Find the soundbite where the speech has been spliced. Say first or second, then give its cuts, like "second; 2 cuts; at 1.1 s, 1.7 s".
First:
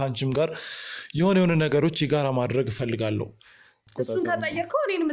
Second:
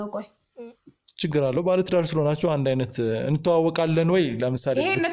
first; 1 cut; at 3.9 s